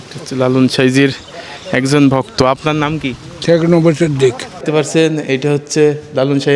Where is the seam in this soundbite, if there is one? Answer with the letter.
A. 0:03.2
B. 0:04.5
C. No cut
B